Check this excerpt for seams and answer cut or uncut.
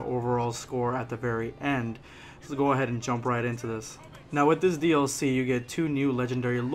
uncut